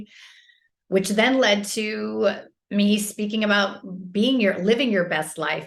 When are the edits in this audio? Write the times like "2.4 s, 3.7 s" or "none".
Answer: none